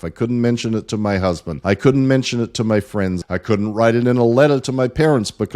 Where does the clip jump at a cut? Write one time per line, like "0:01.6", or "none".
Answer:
0:01.5
0:03.2